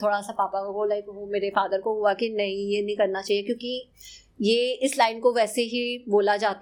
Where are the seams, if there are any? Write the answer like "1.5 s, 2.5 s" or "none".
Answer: none

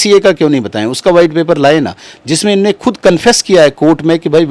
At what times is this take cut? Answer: none

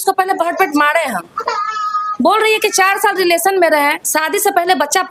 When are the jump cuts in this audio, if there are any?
none

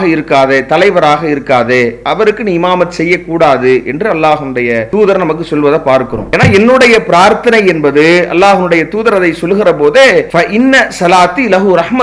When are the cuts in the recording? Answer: 4.9 s, 6.2 s

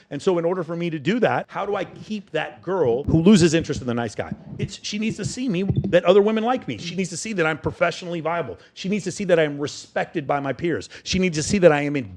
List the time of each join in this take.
1.5 s, 3.0 s

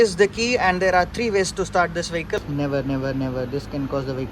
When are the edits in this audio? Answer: 2.4 s

